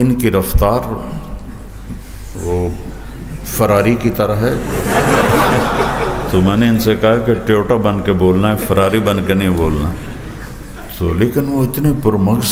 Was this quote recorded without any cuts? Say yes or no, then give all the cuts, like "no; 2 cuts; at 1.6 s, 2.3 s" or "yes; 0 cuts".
yes; 0 cuts